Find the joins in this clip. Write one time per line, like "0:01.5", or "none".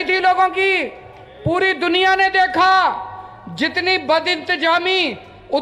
none